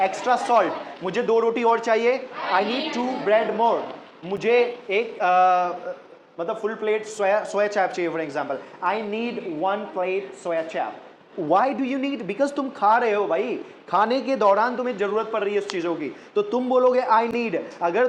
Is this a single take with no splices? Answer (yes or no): yes